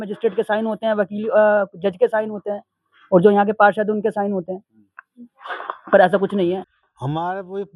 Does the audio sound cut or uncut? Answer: cut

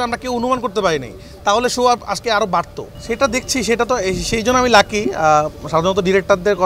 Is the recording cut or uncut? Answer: uncut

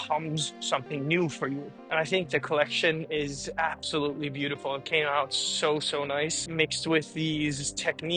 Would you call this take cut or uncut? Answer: cut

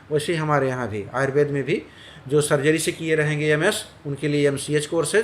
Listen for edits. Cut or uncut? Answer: uncut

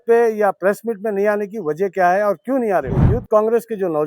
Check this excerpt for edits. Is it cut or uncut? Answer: cut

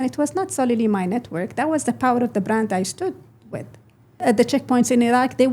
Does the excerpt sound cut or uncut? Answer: cut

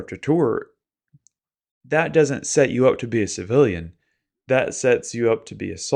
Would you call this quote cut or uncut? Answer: uncut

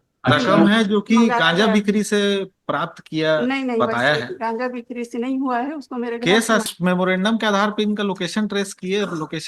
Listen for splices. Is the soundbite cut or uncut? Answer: cut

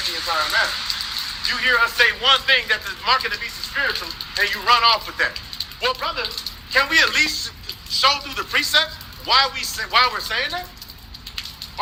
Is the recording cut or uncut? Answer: uncut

